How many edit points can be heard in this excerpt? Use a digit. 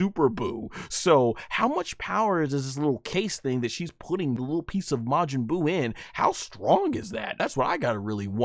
2